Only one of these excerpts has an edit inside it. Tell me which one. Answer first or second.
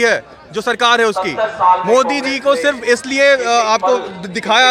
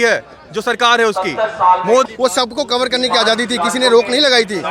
second